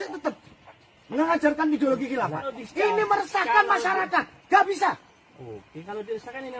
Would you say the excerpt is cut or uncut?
cut